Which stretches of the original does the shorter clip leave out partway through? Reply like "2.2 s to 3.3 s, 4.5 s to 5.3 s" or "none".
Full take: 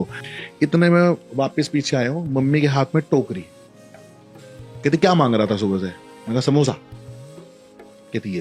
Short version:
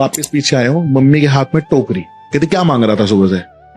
3.5 s to 4.6 s